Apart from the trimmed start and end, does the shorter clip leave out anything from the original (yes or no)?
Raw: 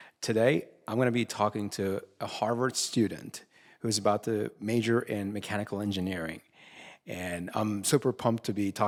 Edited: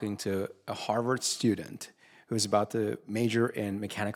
no